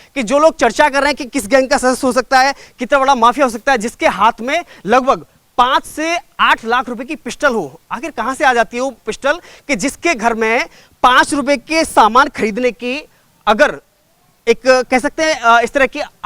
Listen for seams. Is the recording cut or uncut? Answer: uncut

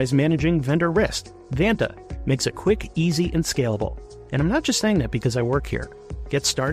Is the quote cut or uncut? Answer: uncut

